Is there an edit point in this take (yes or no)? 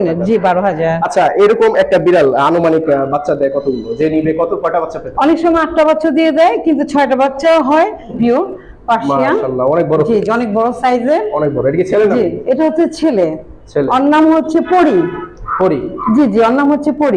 yes